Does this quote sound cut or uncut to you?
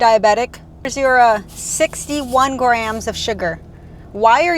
cut